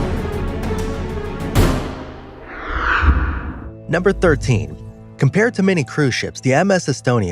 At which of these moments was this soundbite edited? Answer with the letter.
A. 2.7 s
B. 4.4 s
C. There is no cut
B